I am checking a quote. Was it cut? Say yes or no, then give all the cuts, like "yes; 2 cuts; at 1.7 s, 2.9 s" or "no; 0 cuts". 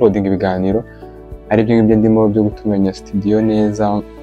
no; 0 cuts